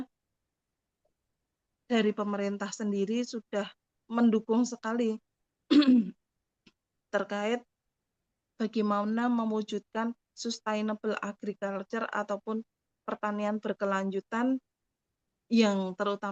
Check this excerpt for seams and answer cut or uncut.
uncut